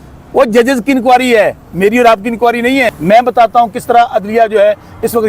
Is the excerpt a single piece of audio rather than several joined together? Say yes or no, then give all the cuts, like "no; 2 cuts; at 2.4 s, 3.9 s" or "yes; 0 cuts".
no; 1 cut; at 2.9 s